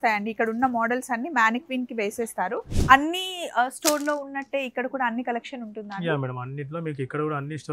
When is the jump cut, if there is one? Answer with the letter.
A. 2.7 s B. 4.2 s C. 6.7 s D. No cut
A